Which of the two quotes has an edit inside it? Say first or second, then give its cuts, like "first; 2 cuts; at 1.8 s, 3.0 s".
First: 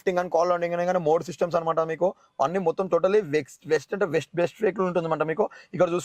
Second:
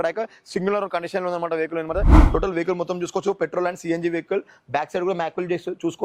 second; 1 cut; at 2.2 s